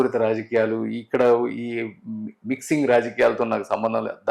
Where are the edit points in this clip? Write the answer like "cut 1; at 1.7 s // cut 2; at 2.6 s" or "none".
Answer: none